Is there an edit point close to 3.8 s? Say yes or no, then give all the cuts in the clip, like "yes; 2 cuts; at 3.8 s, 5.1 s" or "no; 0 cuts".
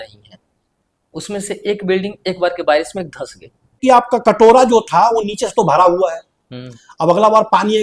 yes; 1 cut; at 3.8 s